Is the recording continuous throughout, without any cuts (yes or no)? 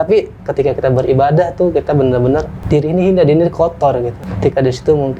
no